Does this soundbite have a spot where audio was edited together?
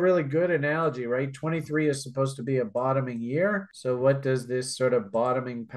no; 0 cuts

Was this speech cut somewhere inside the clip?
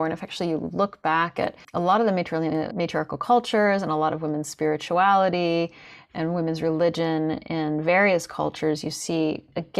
yes; 2 cuts; at 1.6 s, 2.7 s

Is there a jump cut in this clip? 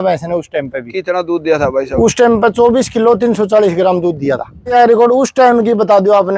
yes; 1 cut; at 4.7 s

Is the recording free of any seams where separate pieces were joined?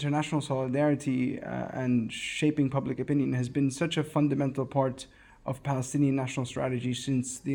yes; 0 cuts

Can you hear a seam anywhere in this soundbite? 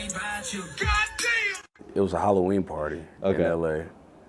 yes; 1 cut; at 1.6 s

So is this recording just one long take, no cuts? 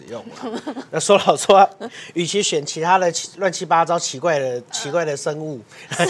yes; 0 cuts

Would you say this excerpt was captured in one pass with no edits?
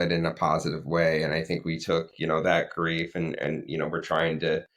yes; 0 cuts

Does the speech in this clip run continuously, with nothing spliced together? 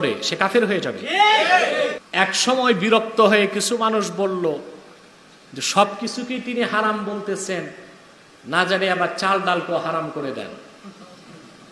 no; 1 cut; at 2.0 s

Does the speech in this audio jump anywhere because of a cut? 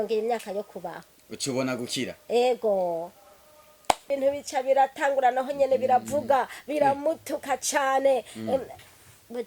yes; 1 cut; at 4.1 s

